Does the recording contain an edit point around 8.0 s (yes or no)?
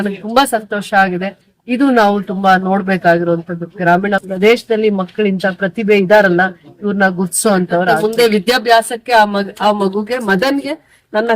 yes